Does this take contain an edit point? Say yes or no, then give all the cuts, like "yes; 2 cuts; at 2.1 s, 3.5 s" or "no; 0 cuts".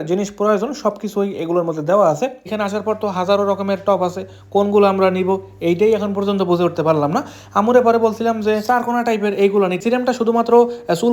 yes; 2 cuts; at 2.5 s, 9.8 s